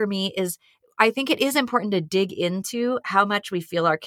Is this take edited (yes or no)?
no